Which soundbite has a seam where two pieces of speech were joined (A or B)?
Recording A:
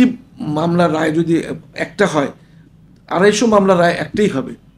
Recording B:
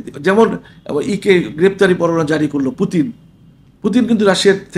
A